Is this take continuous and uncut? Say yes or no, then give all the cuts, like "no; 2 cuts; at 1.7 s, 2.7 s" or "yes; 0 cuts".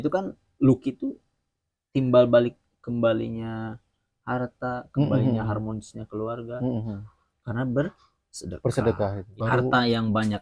no; 1 cut; at 9.3 s